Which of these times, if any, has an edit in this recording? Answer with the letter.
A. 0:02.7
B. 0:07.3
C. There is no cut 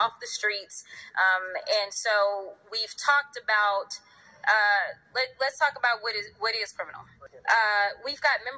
B